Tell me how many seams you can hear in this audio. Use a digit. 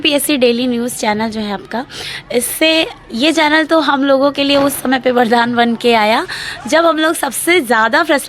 0